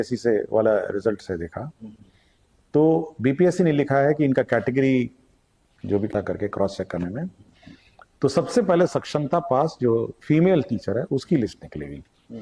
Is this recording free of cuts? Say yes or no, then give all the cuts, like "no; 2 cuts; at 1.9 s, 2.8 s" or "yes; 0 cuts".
no; 1 cut; at 6.1 s